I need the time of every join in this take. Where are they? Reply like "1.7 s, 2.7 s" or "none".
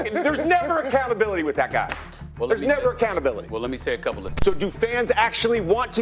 4.3 s